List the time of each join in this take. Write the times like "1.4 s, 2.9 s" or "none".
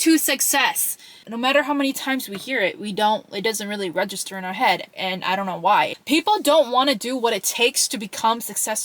1.2 s, 6.0 s